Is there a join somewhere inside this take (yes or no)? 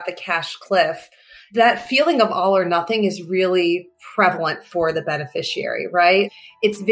no